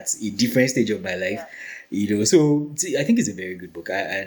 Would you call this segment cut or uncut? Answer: uncut